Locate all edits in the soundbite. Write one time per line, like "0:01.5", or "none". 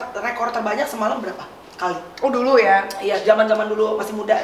none